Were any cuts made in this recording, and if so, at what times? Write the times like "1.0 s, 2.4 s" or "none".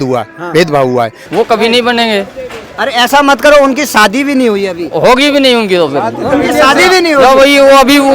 1.2 s